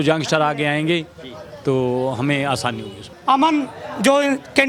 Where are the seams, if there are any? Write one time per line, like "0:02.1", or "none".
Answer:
0:03.1